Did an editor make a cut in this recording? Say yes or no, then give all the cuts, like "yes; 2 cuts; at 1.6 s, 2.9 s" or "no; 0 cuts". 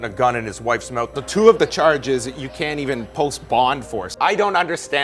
yes; 2 cuts; at 1.1 s, 4.1 s